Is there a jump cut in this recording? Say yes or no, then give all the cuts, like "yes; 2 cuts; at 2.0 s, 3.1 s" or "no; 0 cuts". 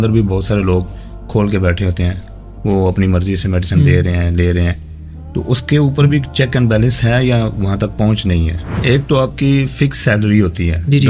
yes; 1 cut; at 8.6 s